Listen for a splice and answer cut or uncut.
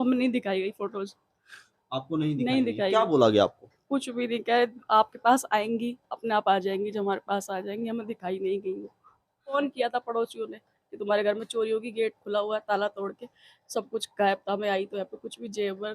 cut